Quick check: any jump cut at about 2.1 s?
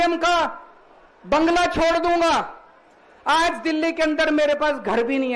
no; 0 cuts

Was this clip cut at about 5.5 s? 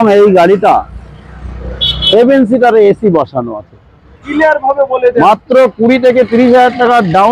no; 1 cut; at 4.3 s

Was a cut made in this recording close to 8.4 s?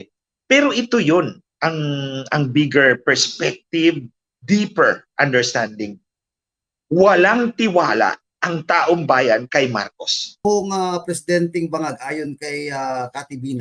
no; 1 cut; at 10.4 s

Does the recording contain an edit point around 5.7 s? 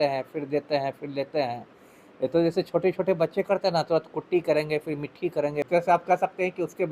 yes; 1 cut; at 5.7 s

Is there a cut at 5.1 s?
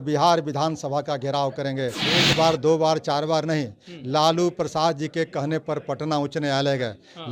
no; 1 cut; at 2.0 s

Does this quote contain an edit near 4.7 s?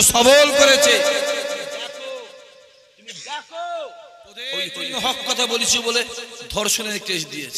yes; 1 cut; at 4.7 s

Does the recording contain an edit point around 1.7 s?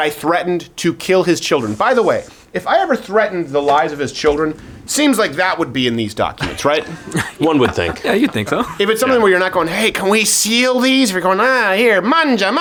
no; 0 cuts

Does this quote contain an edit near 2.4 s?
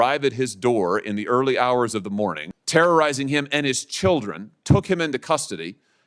yes; 1 cut; at 2.4 s

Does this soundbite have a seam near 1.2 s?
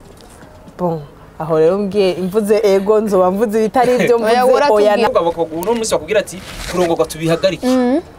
no; 1 cut; at 5.1 s

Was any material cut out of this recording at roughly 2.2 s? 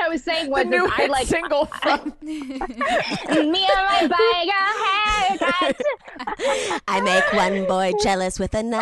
no; 1 cut; at 6.1 s

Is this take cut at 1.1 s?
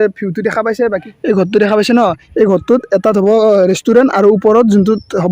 yes; 1 cut; at 1.1 s

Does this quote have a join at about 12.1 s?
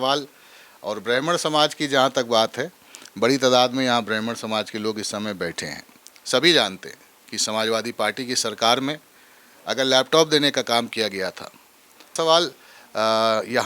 yes; 1 cut; at 12.1 s

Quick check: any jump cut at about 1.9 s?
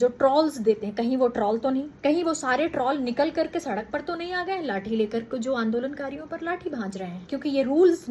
yes; 2 cuts; at 1.9 s, 7.2 s

